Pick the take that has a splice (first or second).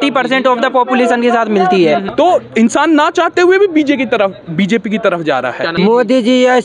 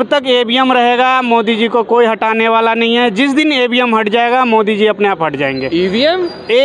first